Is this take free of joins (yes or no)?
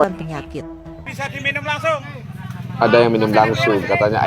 no